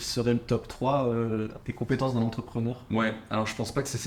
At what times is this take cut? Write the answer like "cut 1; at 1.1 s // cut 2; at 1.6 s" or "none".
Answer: cut 1; at 1.6 s